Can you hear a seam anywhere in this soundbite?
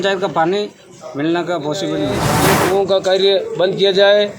yes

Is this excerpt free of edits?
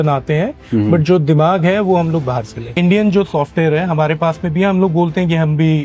no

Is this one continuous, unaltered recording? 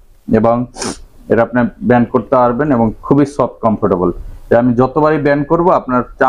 yes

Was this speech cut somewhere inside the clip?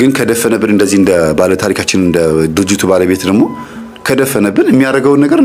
no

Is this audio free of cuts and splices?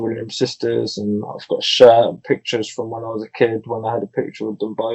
yes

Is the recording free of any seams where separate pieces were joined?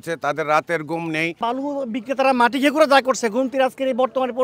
no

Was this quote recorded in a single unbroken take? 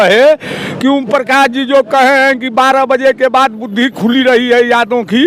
yes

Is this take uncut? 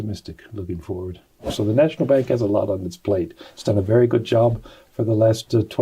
no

